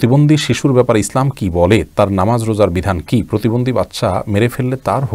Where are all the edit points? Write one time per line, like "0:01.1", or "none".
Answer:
none